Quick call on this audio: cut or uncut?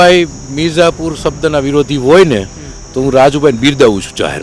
uncut